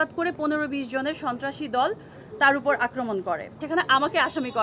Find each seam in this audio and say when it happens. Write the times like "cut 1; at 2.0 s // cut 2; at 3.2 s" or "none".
cut 1; at 3.6 s